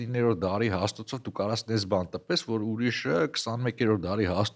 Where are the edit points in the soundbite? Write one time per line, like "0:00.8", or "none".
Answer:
none